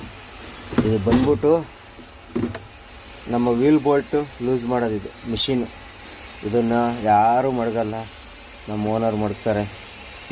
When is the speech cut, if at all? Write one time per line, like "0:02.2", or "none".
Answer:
none